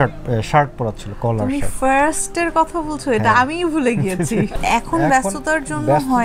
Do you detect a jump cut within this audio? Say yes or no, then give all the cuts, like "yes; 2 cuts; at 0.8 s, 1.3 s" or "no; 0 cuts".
no; 0 cuts